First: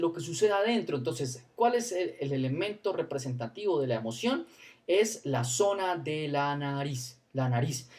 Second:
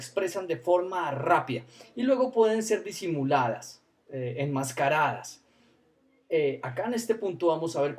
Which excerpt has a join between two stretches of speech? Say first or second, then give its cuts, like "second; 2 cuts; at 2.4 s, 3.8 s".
first; 1 cut; at 1.3 s